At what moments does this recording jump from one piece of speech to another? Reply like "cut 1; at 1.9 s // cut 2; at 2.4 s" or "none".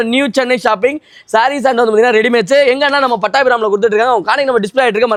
none

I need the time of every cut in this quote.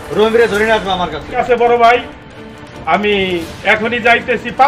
cut 1; at 1.4 s

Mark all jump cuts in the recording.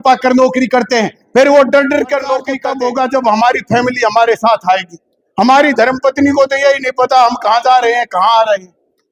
cut 1; at 2.6 s

